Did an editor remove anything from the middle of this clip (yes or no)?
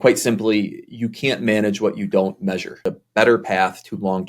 yes